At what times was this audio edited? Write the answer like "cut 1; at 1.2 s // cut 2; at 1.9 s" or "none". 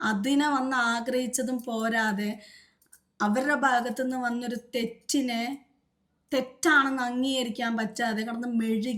none